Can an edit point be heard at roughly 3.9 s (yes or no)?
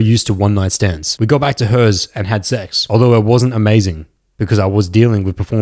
no